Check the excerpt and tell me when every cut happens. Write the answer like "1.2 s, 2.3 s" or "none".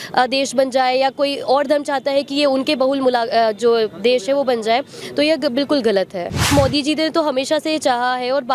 6.5 s